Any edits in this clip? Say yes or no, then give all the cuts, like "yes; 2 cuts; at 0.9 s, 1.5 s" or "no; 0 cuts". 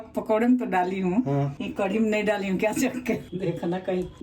yes; 1 cut; at 3.3 s